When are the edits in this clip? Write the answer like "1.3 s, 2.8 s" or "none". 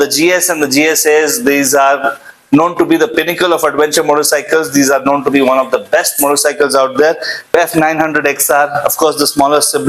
7.5 s